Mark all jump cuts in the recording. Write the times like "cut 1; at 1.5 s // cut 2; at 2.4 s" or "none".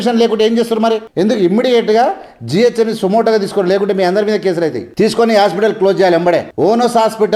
cut 1; at 1.1 s // cut 2; at 4.8 s // cut 3; at 6.5 s